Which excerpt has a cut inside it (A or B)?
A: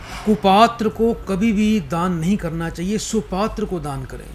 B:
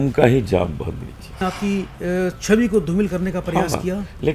B